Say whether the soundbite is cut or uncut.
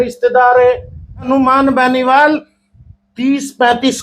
cut